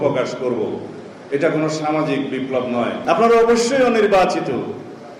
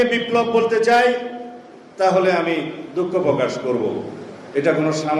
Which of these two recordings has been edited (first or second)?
first